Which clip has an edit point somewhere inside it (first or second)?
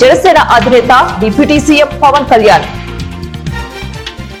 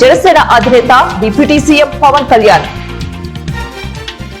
second